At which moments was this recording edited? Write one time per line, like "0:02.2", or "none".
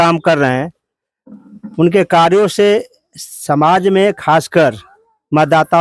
none